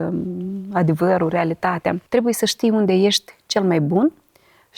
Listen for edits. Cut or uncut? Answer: cut